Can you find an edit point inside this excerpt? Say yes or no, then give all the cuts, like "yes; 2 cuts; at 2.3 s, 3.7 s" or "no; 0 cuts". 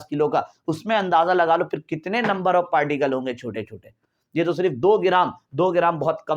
no; 0 cuts